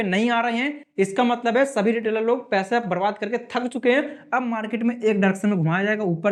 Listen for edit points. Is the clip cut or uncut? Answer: uncut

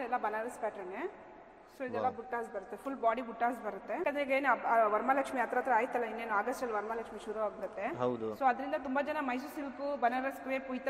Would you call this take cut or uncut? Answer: cut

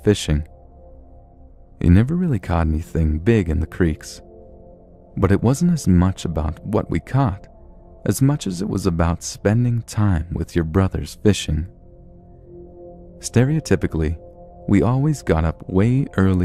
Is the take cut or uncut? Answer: uncut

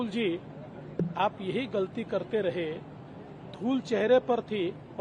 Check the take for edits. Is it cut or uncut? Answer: uncut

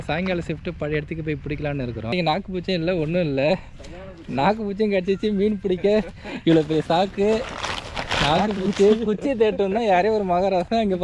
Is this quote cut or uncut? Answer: cut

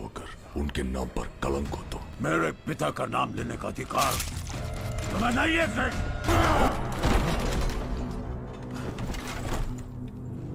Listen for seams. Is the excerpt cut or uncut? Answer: uncut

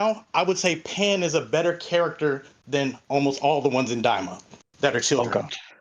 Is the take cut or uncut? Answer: uncut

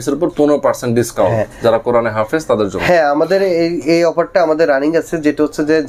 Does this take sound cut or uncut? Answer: uncut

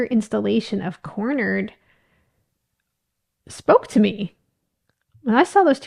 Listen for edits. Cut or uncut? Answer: uncut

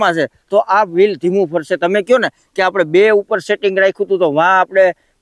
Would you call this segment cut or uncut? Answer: uncut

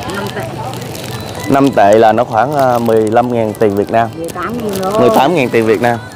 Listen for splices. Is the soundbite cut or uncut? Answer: uncut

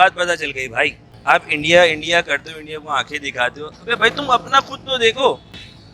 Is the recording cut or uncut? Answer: cut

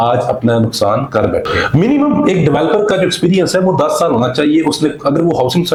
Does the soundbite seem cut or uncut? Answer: uncut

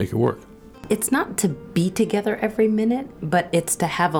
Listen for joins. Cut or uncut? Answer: cut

